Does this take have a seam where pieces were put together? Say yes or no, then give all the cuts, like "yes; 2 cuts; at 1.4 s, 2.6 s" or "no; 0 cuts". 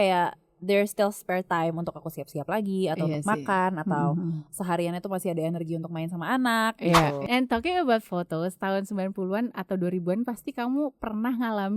yes; 1 cut; at 7.2 s